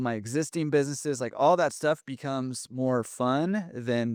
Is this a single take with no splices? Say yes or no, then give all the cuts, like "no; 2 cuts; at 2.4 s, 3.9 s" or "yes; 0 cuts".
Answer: yes; 0 cuts